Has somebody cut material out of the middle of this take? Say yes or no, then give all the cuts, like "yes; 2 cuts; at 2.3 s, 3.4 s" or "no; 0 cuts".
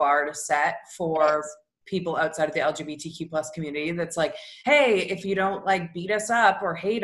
no; 0 cuts